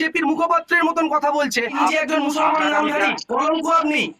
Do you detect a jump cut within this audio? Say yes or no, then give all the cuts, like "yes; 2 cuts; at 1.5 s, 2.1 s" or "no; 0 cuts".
yes; 1 cut; at 1.7 s